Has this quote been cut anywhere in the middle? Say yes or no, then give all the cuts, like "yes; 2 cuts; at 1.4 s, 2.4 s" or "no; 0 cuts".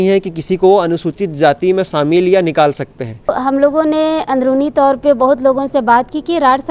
yes; 1 cut; at 3.3 s